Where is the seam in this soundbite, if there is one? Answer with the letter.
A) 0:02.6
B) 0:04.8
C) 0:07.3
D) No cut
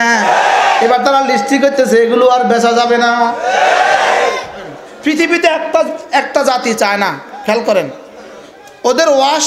B